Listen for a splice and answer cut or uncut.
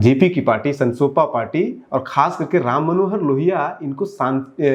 uncut